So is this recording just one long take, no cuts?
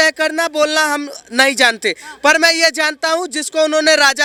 yes; 0 cuts

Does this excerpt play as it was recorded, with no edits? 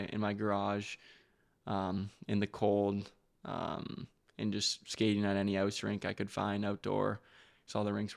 yes; 0 cuts

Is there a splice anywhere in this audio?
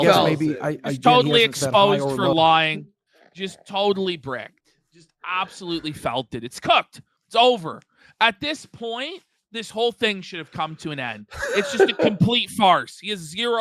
no; 0 cuts

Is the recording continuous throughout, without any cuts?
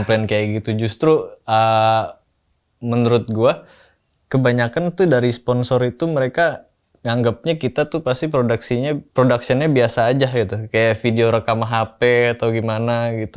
yes; 0 cuts

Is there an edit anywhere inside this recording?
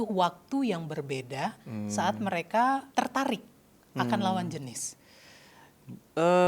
yes; 1 cut; at 2.9 s

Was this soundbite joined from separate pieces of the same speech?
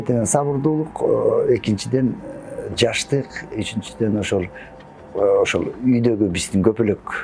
no; 0 cuts

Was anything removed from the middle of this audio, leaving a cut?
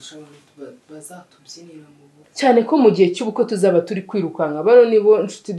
yes; 1 cut; at 2.2 s

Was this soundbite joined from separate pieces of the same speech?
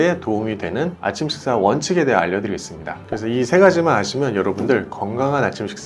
no; 0 cuts

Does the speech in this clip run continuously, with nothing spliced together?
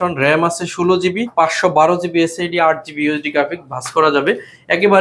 no; 1 cut; at 1.3 s

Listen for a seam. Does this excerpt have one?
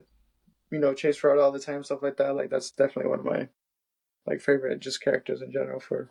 no; 0 cuts

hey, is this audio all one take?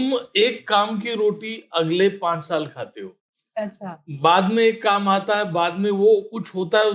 yes; 0 cuts

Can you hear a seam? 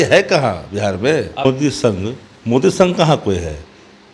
yes; 1 cut; at 1.4 s

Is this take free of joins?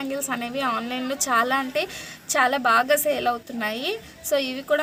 yes; 0 cuts

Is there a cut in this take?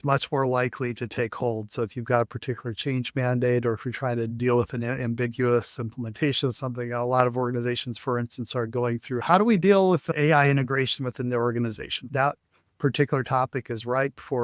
no; 0 cuts

